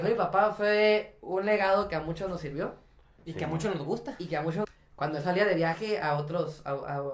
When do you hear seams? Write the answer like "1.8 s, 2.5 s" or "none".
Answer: 4.7 s